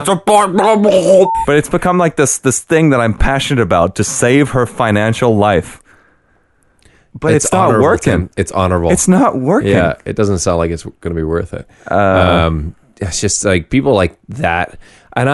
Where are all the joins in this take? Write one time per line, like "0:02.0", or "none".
0:01.4